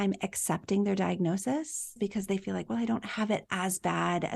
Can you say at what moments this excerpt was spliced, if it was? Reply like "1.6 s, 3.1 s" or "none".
2.0 s